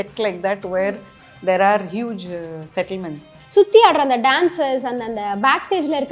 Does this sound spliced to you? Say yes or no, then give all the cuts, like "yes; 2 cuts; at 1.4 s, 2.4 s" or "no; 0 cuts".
yes; 1 cut; at 3.4 s